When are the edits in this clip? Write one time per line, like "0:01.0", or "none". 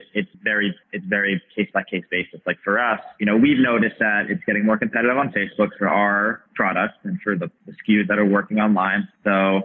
0:03.1